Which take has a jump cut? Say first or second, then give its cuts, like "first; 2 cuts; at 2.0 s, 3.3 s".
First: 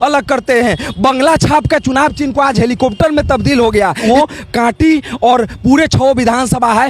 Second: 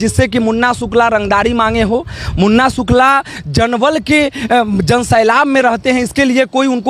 first; 1 cut; at 4.0 s